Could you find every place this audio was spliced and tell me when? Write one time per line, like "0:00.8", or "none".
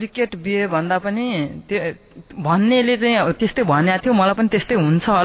none